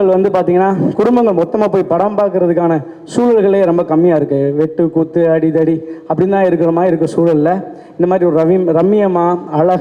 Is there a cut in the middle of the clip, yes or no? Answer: no